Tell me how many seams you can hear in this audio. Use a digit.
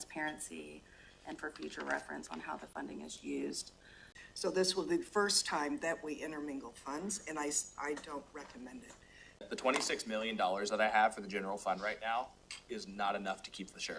2